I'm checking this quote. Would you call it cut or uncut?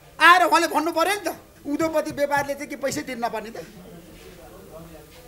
cut